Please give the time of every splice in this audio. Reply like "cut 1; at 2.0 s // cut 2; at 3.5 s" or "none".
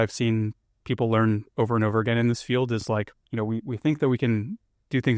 cut 1; at 2.9 s